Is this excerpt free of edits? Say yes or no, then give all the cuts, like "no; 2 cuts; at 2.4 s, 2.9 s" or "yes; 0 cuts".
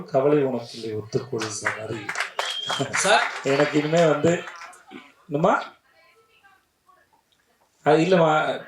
yes; 0 cuts